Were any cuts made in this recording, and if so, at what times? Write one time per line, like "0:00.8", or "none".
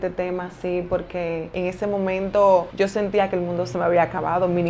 0:01.5
0:02.7
0:03.7